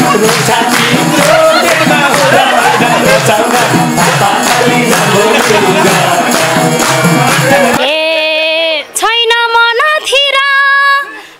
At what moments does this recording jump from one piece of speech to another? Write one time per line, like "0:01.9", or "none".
0:07.8